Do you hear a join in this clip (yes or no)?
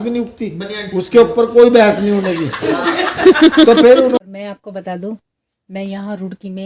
yes